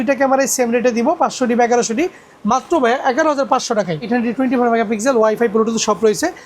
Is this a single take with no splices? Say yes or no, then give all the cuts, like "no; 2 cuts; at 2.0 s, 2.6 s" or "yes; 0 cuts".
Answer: no; 1 cut; at 4.1 s